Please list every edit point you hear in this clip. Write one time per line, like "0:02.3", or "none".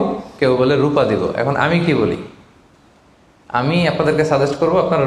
none